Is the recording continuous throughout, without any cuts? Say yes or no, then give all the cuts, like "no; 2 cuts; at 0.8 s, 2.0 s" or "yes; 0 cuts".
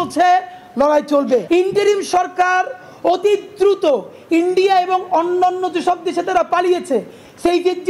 no; 1 cut; at 1.4 s